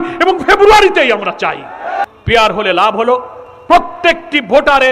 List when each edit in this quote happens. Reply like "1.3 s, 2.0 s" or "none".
2.0 s